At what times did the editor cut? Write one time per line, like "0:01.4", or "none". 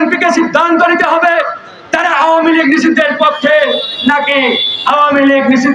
none